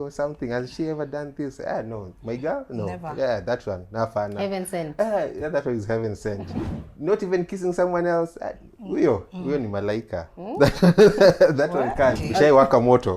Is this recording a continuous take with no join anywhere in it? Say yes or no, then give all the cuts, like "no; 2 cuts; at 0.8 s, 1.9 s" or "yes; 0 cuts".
no; 1 cut; at 12.2 s